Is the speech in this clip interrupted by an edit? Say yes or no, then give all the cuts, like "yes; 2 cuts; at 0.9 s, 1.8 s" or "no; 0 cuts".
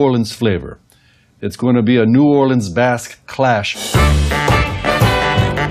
no; 0 cuts